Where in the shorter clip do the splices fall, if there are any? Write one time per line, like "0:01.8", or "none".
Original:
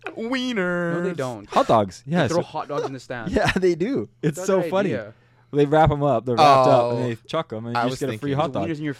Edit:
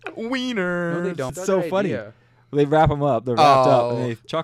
0:01.4